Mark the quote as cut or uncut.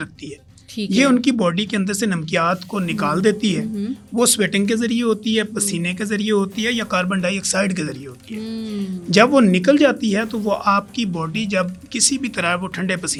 uncut